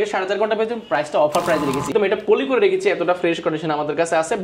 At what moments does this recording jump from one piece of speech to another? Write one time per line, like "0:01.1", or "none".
0:01.9